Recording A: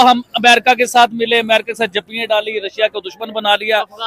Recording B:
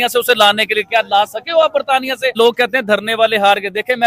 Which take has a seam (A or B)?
B